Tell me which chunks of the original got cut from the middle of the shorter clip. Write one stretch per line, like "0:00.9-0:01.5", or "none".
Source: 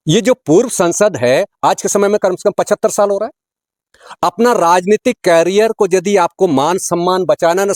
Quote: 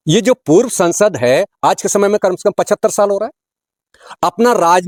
none